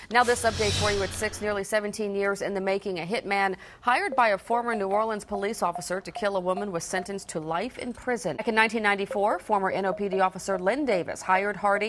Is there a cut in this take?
yes; 1 cut; at 8.4 s

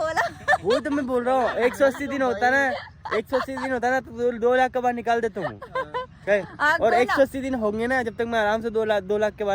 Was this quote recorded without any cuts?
yes; 0 cuts

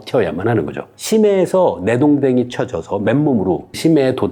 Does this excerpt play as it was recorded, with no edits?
yes; 0 cuts

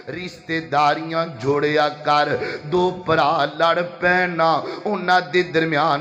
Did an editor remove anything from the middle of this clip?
no; 0 cuts

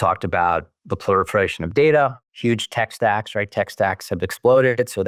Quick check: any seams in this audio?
no; 0 cuts

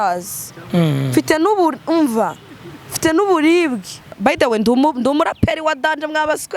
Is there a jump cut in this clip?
yes; 1 cut; at 4.1 s

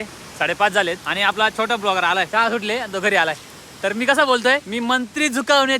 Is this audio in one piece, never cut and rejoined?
no; 3 cuts; at 1.1 s, 2.3 s, 4.7 s

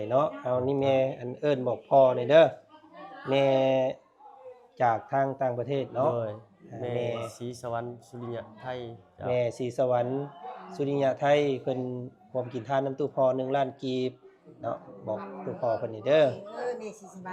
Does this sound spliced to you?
no; 0 cuts

